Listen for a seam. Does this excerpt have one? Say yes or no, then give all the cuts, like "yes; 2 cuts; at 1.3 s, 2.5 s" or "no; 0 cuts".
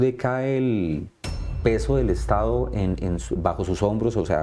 no; 0 cuts